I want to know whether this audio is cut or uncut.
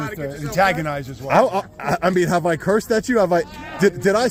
uncut